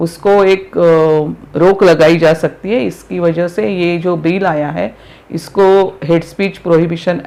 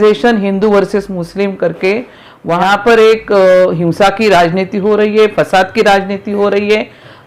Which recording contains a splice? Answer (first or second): second